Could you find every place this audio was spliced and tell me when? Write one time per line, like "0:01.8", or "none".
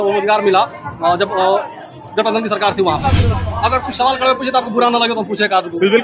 0:03.4